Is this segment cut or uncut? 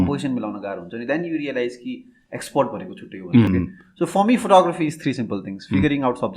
cut